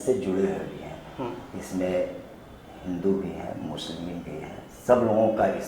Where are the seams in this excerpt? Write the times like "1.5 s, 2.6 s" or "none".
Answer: none